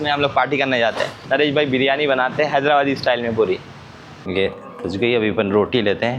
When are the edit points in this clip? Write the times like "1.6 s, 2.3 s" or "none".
1.1 s, 4.3 s